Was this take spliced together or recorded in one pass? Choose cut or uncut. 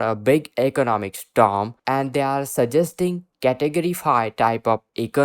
cut